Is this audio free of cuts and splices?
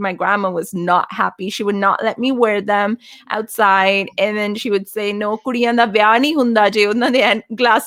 yes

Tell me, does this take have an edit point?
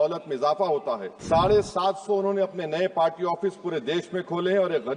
yes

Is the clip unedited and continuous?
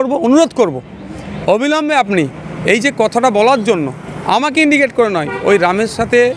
yes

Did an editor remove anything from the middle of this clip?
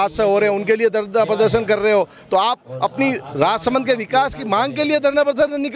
no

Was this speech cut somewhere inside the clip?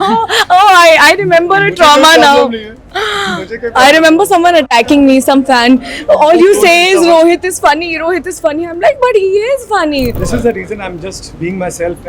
yes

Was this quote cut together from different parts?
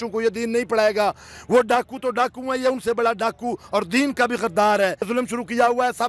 yes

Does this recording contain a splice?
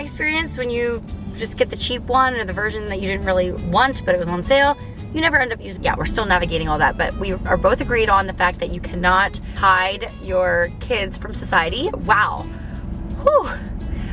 yes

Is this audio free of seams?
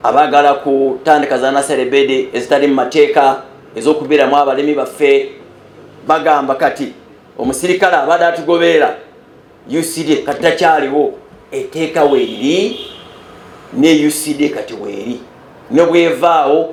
yes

